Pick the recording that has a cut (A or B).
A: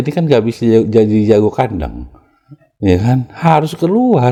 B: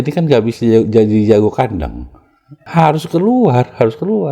B